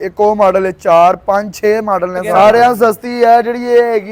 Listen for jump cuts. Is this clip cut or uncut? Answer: cut